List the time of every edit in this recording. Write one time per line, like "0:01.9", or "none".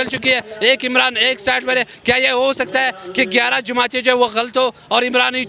none